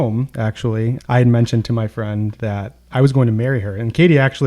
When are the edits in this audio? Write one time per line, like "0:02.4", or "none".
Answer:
0:01.0
0:02.7